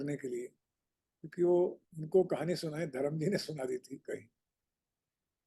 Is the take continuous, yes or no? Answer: no